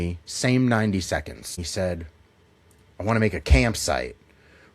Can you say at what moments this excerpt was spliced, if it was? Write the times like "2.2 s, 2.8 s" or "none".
1.6 s

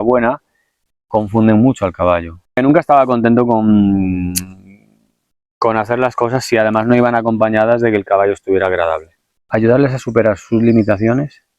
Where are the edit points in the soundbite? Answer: 2.6 s, 9.4 s

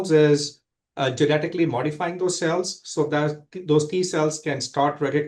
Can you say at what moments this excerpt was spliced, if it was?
none

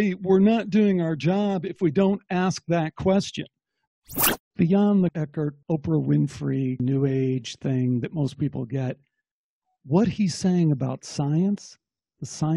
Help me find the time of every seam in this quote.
3.8 s, 5.2 s, 6.8 s

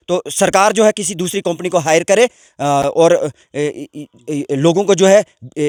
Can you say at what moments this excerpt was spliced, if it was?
none

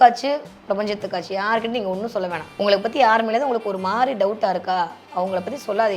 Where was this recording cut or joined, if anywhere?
2.4 s

